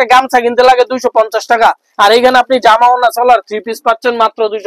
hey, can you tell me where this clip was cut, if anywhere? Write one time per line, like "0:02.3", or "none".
none